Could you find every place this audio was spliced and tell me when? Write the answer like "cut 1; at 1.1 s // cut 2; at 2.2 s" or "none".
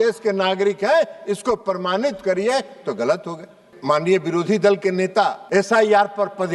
cut 1; at 3.7 s // cut 2; at 5.4 s